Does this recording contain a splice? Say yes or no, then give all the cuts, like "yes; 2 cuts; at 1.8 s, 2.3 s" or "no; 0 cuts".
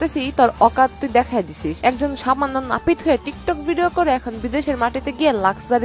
no; 0 cuts